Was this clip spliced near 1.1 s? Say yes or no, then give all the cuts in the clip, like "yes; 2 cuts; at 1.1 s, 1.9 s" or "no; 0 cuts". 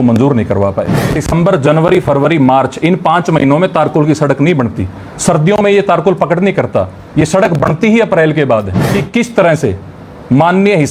yes; 2 cuts; at 1.1 s, 8.8 s